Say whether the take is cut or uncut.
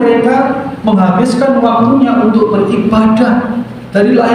uncut